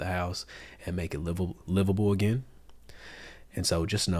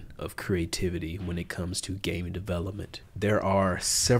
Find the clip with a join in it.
second; 1 cut; at 3.0 s

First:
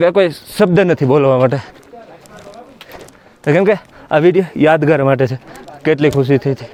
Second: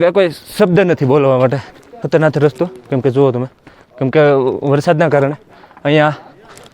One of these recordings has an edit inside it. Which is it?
second; 1 cut; at 2.0 s

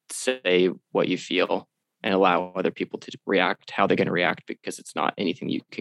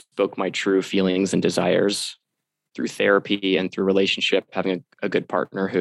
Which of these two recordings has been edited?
second; 1 cut; at 2.6 s

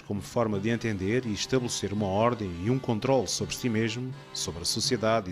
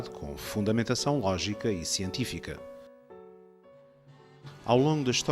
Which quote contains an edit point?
second; 1 cut; at 1.6 s

